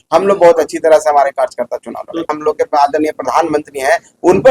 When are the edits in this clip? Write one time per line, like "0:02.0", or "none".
0:02.3